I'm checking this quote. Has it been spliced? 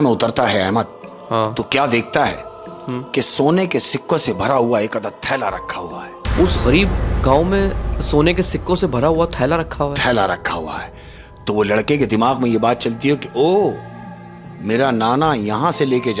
no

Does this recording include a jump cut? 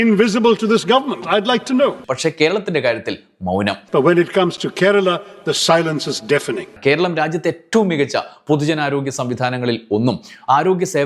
yes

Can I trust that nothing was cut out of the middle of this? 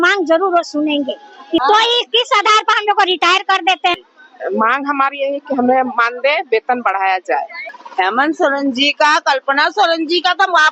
no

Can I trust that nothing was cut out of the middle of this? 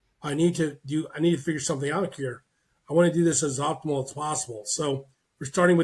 yes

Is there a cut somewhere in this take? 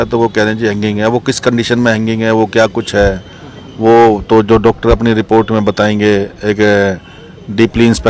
no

